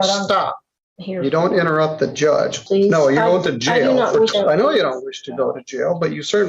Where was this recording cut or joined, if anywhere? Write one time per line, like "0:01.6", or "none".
0:02.6
0:04.3